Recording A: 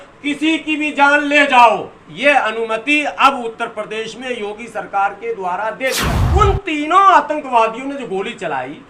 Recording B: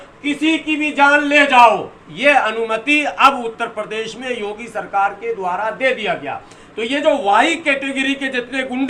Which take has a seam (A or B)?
A